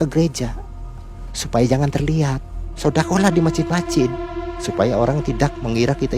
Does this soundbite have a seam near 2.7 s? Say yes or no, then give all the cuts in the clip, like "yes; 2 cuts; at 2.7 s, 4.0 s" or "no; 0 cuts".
yes; 1 cut; at 2.7 s